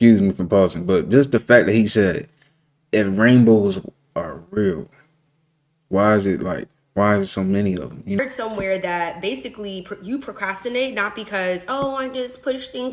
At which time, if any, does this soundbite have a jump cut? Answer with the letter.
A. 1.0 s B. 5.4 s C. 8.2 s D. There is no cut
C